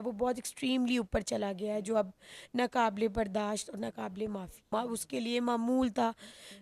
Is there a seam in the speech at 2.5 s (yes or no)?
no